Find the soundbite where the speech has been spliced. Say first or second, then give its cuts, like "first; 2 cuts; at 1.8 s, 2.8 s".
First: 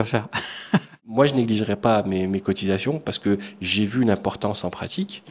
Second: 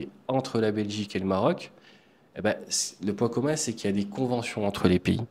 first; 1 cut; at 1.0 s